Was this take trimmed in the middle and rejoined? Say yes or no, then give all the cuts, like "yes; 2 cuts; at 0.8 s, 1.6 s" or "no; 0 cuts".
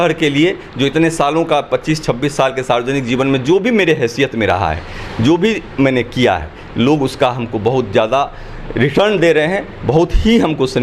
no; 0 cuts